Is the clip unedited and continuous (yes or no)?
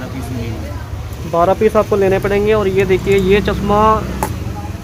yes